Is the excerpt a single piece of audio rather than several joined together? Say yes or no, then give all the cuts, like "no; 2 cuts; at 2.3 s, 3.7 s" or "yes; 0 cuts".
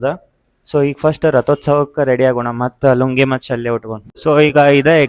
no; 1 cut; at 4.0 s